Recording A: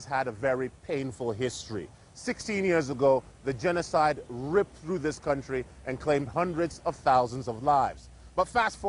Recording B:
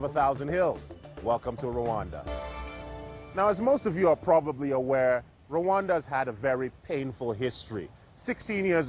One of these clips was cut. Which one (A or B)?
B